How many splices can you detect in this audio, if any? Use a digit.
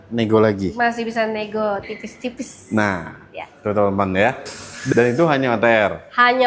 1